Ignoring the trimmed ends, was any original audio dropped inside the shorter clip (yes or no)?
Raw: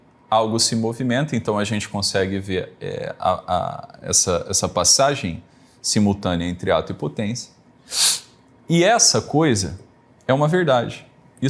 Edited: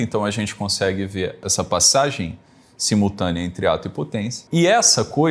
yes